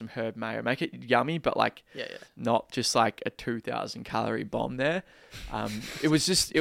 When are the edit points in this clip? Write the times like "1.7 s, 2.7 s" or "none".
none